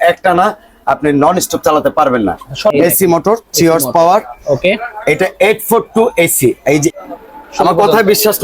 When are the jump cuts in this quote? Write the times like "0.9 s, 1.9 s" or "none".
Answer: 2.7 s, 6.9 s